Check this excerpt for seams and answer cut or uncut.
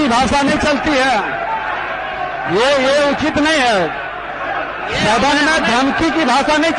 uncut